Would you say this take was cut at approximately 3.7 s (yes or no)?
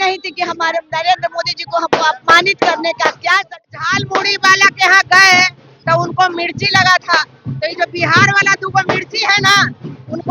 yes